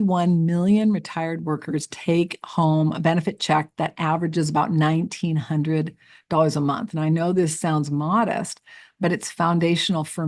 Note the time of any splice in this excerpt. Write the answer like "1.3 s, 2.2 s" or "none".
none